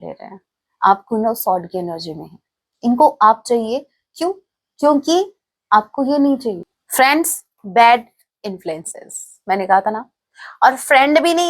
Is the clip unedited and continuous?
no; 1 cut; at 6.7 s

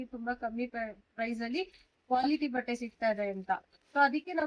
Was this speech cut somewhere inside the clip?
no; 0 cuts

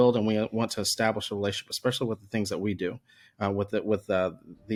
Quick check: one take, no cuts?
yes; 0 cuts

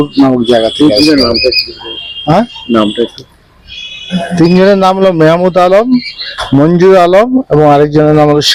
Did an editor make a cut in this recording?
no; 0 cuts

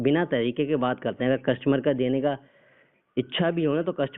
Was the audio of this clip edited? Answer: no; 0 cuts

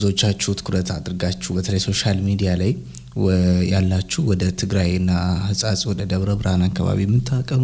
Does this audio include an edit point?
no; 0 cuts

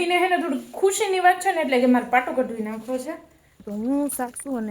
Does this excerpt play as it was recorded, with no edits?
no; 1 cut; at 3.7 s

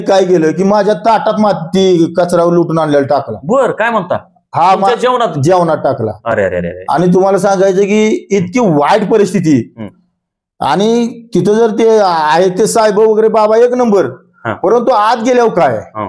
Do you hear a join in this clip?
no; 0 cuts

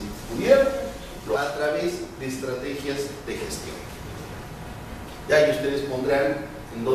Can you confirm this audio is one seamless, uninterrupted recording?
yes; 0 cuts

